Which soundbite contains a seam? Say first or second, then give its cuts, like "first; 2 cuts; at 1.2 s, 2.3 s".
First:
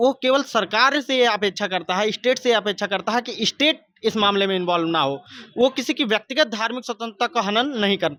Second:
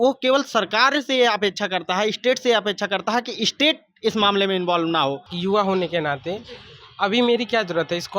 second; 1 cut; at 5.3 s